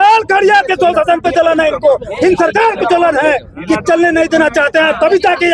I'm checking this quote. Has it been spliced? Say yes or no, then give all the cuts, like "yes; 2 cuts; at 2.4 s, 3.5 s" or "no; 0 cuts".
no; 0 cuts